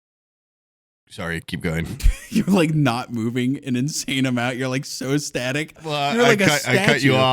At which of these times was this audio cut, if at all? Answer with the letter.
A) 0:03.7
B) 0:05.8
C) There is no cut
B